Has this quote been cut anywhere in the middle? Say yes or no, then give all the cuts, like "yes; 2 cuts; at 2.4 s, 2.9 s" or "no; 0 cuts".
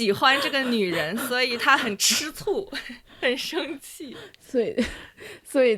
no; 0 cuts